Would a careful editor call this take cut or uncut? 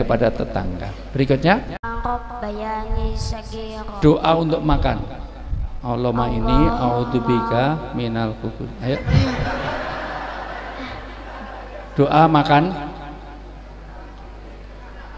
cut